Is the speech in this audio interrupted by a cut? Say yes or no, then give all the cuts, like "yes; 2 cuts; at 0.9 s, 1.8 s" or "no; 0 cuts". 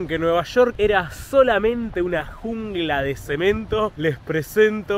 no; 0 cuts